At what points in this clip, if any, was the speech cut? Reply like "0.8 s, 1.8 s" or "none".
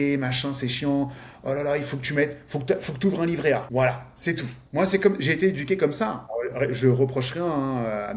3.7 s, 4.6 s, 6.2 s

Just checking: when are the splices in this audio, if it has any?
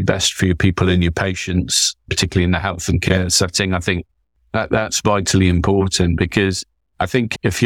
none

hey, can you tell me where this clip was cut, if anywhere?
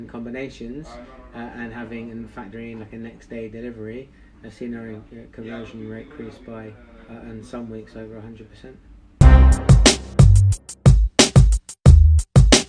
9.0 s

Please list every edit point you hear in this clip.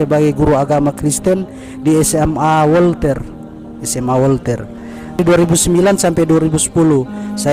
5.2 s

